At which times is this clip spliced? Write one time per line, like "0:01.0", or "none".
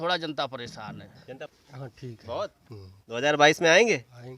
0:01.6